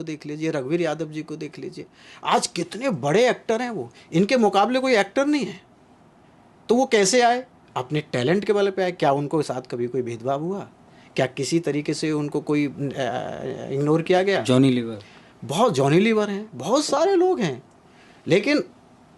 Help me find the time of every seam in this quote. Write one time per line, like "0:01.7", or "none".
none